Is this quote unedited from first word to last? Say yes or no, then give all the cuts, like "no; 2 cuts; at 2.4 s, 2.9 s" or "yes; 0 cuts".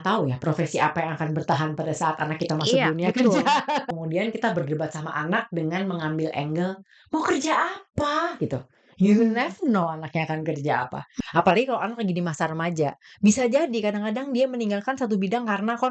no; 2 cuts; at 3.9 s, 11.1 s